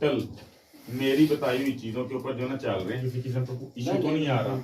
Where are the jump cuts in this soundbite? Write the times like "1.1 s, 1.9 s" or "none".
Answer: 3.0 s